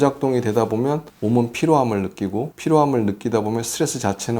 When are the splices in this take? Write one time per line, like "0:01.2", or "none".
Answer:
0:01.1
0:02.5